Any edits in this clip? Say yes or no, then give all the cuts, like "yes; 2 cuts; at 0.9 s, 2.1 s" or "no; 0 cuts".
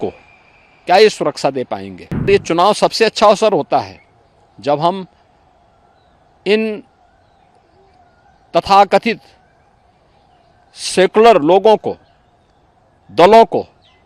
yes; 1 cut; at 2.3 s